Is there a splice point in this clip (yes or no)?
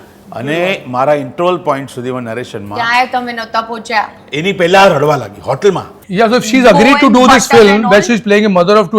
yes